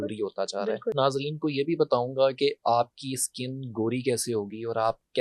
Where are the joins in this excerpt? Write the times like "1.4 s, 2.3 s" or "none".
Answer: 0.9 s